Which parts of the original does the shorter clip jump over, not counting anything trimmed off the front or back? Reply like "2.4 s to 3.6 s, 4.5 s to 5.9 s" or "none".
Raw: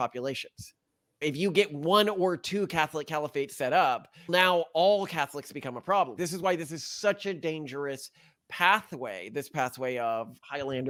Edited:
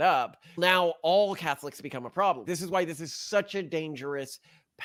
none

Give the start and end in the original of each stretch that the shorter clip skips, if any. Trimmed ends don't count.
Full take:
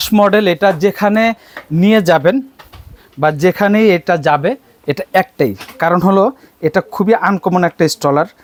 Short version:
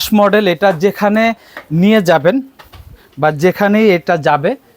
none

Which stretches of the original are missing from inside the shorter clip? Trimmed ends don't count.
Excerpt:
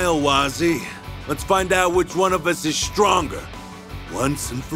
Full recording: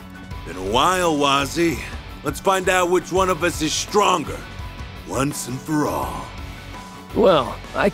none

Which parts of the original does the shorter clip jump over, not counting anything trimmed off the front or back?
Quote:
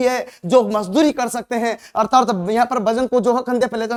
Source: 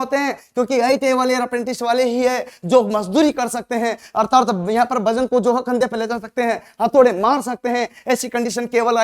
none

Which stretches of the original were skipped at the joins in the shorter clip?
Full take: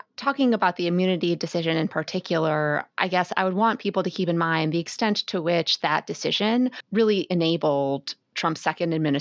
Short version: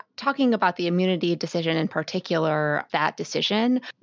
2.8 s to 5.7 s

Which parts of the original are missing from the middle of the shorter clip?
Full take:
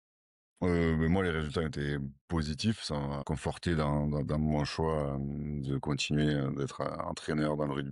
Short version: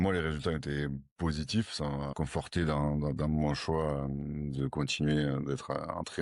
none

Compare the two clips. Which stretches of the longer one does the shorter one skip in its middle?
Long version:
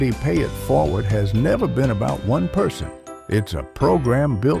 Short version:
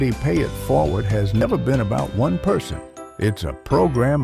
1.4 s to 1.5 s

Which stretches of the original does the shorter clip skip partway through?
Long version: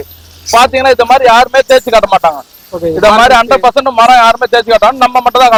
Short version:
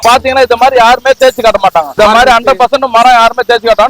2.4 s to 3.0 s

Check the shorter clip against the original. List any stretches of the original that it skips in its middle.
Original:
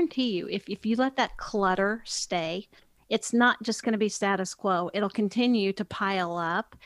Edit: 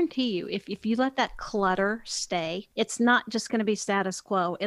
2.6 s to 3.0 s

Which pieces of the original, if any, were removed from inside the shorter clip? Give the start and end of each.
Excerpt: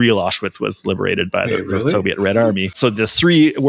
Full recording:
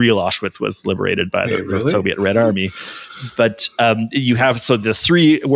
2.7 s to 4.6 s

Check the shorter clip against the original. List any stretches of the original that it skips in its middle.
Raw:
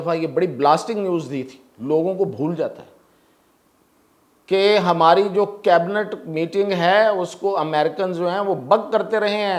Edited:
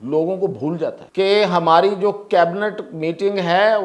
2.8 s to 4.4 s

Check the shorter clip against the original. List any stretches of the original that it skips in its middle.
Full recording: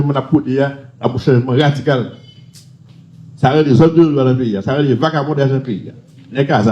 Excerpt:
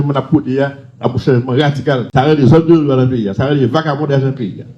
2.1 s to 3.4 s

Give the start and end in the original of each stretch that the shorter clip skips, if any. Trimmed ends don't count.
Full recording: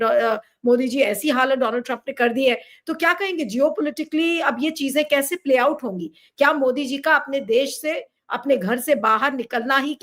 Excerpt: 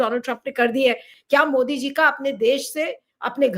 2.7 s to 6.2 s

